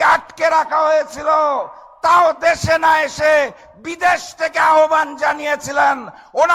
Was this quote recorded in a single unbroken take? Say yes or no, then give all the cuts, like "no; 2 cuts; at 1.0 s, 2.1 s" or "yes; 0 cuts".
yes; 0 cuts